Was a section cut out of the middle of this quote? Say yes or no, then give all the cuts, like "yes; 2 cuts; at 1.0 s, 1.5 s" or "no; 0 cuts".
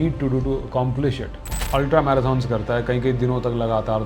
yes; 1 cut; at 1.3 s